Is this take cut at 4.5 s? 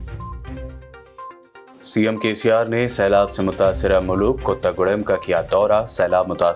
no; 1 cut; at 1.7 s

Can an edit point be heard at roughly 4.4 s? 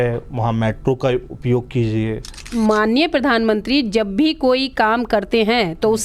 no; 1 cut; at 2.5 s

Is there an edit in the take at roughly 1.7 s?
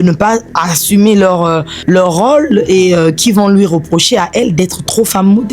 yes; 1 cut; at 1.7 s

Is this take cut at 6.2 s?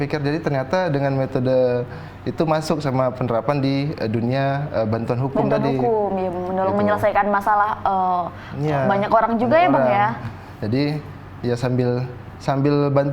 no; 0 cuts

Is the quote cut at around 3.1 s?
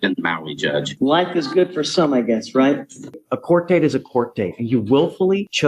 yes; 2 cuts; at 0.9 s, 3.1 s

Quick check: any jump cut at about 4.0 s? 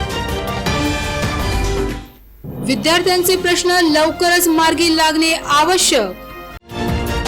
no; 1 cut; at 2.0 s

